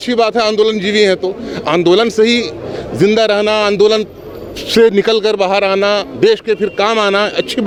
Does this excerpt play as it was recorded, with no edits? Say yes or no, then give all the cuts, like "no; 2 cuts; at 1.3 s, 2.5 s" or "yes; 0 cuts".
yes; 0 cuts